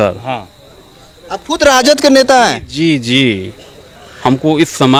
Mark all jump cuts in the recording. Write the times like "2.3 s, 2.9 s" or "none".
none